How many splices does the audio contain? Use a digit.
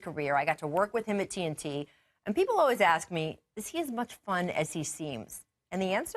1